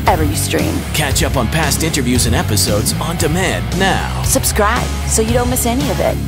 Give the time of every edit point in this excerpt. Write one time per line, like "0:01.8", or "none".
none

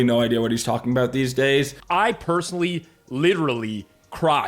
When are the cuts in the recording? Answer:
0:01.8

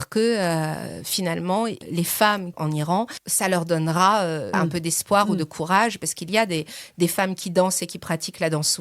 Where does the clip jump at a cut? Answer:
0:02.7
0:04.5

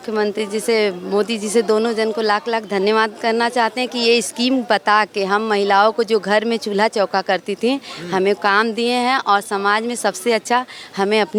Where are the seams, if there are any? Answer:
none

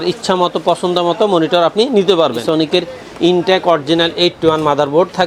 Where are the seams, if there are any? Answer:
0:02.4

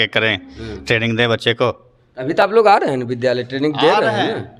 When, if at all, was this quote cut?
none

